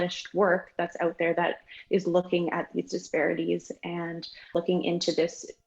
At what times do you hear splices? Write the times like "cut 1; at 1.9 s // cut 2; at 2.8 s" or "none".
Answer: cut 1; at 4.5 s